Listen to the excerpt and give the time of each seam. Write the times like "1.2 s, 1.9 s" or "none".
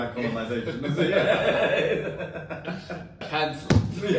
3.3 s